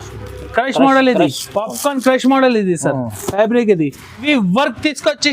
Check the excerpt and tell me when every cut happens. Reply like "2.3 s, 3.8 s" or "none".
4.2 s